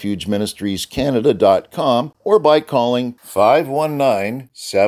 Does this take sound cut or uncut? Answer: cut